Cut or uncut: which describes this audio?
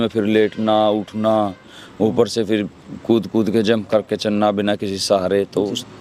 uncut